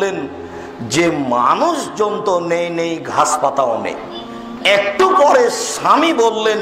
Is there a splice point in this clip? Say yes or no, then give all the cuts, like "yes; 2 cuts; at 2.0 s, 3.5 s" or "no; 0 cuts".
yes; 1 cut; at 4.4 s